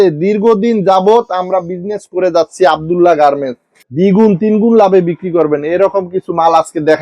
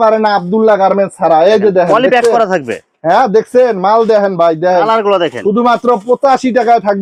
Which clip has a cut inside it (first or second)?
first